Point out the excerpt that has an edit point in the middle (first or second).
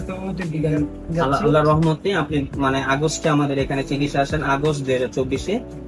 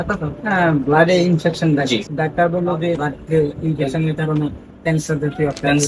second